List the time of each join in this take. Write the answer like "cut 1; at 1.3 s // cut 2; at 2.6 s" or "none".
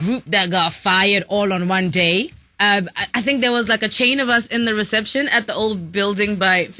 cut 1; at 2.4 s

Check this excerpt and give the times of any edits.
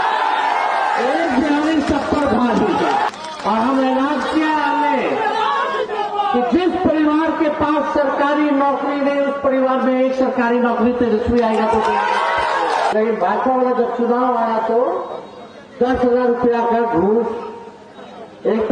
cut 1; at 3.1 s // cut 2; at 12.9 s

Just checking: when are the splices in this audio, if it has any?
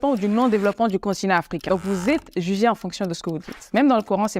cut 1; at 1.6 s

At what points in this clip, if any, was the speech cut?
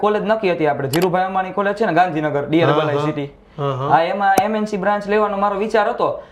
none

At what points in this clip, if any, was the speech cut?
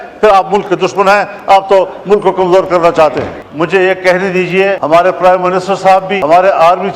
cut 1; at 3.4 s // cut 2; at 4.8 s // cut 3; at 6.1 s

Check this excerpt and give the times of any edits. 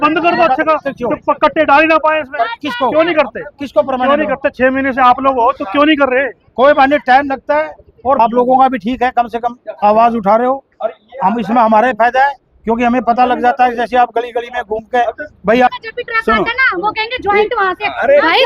cut 1; at 8.2 s // cut 2; at 15.7 s

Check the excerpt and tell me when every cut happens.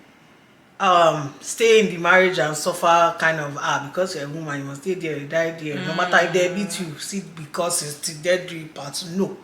none

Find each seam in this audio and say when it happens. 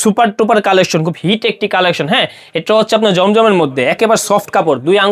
none

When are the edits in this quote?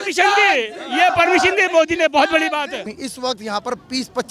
cut 1; at 2.9 s

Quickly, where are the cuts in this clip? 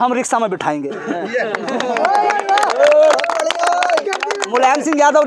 none

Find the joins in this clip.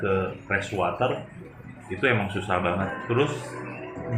cut 1; at 2.9 s

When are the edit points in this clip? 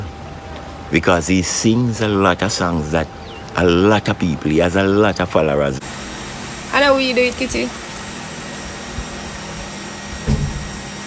cut 1; at 5.8 s

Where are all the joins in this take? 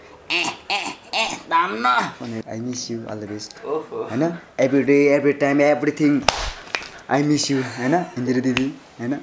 cut 1; at 2.4 s

